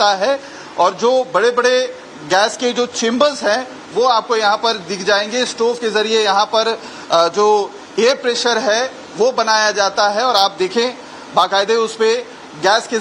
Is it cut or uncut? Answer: uncut